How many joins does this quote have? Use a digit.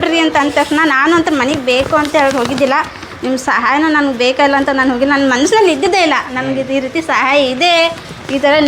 0